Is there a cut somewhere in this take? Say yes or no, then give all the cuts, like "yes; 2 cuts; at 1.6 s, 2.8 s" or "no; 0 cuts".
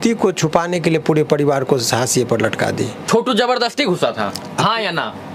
yes; 1 cut; at 3.0 s